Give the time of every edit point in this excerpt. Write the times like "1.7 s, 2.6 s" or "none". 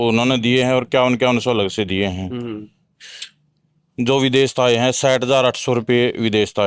none